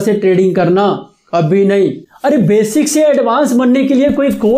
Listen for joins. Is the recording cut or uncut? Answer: cut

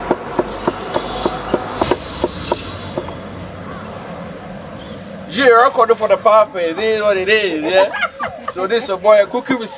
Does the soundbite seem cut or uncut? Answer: cut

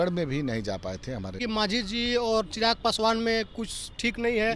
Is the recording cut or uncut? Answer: cut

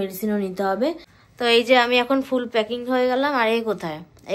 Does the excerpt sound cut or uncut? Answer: cut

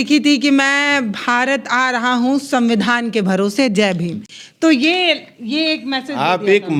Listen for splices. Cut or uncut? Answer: uncut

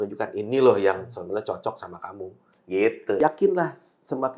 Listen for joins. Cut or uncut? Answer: cut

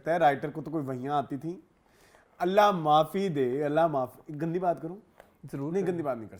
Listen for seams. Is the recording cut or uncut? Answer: uncut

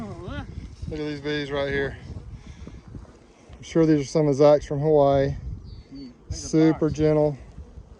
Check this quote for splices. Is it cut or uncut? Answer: uncut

